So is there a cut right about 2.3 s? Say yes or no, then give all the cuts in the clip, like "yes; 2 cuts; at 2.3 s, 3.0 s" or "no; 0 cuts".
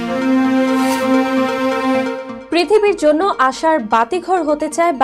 yes; 1 cut; at 2.3 s